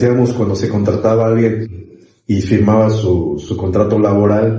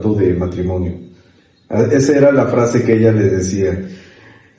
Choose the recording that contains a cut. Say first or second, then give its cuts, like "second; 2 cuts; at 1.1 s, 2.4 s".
first; 1 cut; at 3.5 s